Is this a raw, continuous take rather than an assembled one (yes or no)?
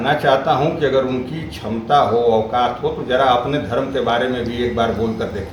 yes